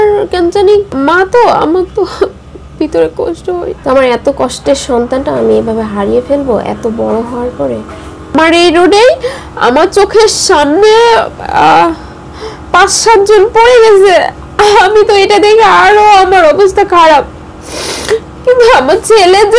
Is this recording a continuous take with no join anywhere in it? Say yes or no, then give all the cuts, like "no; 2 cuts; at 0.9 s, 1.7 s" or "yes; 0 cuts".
no; 3 cuts; at 0.9 s, 3.7 s, 8.1 s